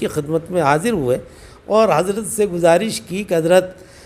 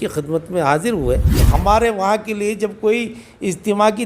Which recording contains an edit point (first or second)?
second